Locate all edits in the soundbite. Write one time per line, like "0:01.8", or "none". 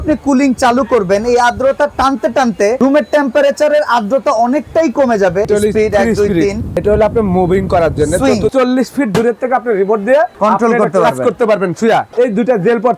0:02.8
0:05.5
0:06.7
0:08.5
0:10.3
0:12.1